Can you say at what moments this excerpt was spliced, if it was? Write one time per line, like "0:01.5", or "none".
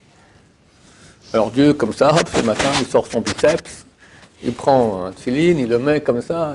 none